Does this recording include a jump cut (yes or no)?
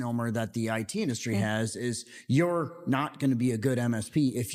no